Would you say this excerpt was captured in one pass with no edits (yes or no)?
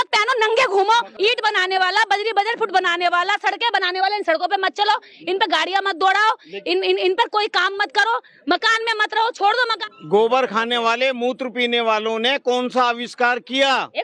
no